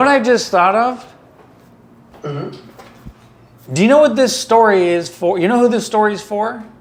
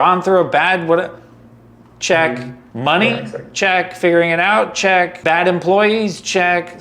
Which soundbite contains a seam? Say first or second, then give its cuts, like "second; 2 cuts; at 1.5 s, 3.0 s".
second; 2 cuts; at 2.6 s, 5.2 s